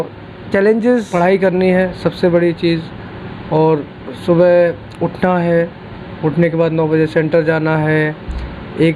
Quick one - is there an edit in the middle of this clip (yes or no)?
yes